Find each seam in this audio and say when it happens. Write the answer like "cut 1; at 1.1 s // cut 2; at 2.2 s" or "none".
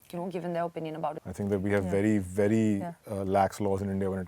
cut 1; at 1.2 s